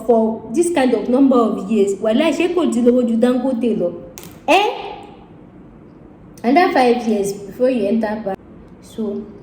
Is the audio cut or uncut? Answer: cut